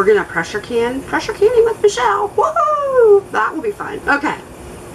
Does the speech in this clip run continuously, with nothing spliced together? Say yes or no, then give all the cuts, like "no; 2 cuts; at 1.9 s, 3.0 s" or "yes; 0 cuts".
yes; 0 cuts